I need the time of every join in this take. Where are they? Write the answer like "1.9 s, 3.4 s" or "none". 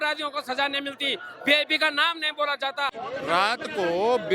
3.0 s